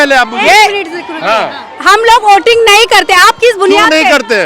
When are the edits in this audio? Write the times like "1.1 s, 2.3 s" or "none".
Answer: none